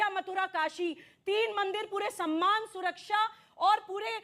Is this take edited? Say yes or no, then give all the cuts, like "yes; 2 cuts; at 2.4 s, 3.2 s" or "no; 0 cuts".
no; 0 cuts